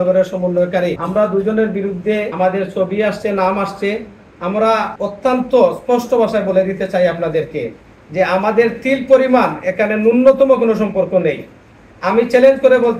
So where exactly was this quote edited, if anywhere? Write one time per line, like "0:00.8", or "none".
0:01.0
0:02.3
0:04.9